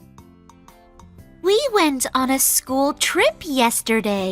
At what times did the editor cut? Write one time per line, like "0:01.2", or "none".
0:01.4